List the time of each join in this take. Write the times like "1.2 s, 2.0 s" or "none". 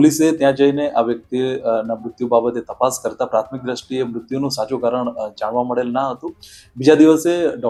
none